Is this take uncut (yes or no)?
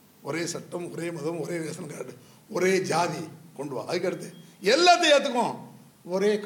yes